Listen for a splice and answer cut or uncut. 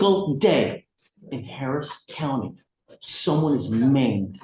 uncut